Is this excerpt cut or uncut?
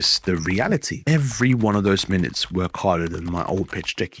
cut